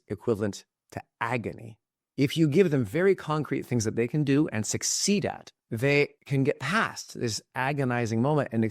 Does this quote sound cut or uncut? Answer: cut